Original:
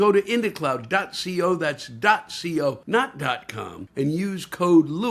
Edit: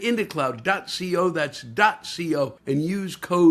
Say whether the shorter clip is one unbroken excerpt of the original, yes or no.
no